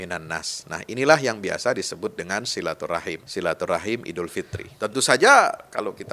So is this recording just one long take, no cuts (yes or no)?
no